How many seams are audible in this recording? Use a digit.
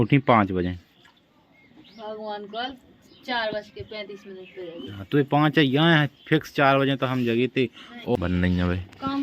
1